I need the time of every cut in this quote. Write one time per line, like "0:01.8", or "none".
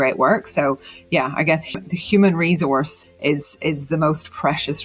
0:01.8
0:03.0